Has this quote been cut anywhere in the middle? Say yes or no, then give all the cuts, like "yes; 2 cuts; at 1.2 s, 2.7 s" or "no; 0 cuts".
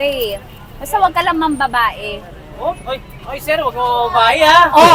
no; 0 cuts